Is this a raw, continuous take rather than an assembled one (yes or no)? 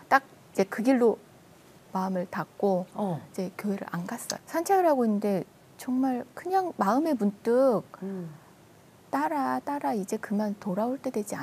no